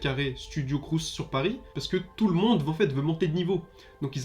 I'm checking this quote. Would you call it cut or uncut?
cut